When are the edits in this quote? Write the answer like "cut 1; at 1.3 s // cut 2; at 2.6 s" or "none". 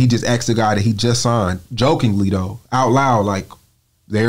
none

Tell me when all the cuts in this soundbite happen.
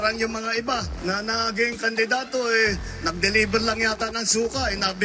none

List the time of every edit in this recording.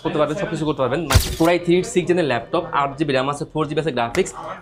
cut 1; at 1.2 s

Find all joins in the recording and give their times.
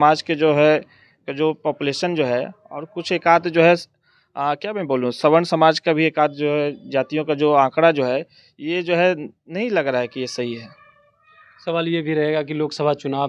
none

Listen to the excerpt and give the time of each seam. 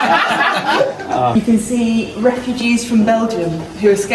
cut 1; at 1.3 s

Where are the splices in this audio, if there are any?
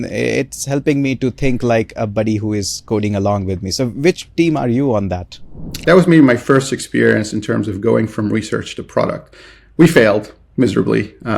cut 1; at 5.8 s

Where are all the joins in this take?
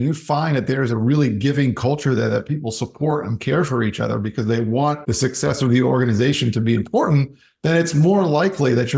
cut 1; at 5.1 s

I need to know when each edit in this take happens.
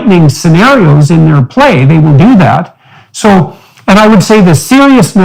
none

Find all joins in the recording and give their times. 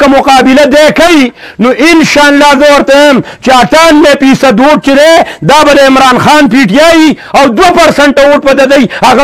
none

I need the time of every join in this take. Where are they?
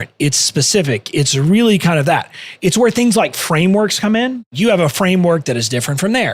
cut 1; at 4.5 s

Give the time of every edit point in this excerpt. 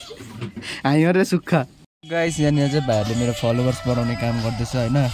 cut 1; at 1.5 s

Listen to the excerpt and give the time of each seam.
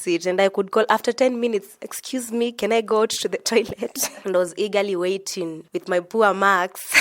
cut 1; at 4.1 s

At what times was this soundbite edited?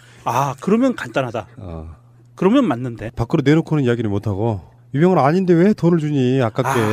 cut 1; at 3.5 s

